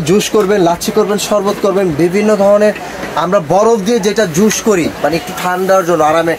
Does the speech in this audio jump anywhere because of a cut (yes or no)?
no